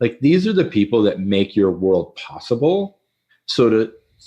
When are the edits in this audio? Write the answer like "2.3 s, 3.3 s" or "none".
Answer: none